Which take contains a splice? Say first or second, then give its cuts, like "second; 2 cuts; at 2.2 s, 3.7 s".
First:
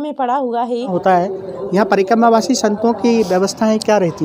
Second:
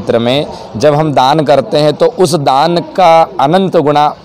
first; 1 cut; at 0.9 s